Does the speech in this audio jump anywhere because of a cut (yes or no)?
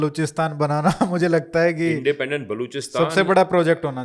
no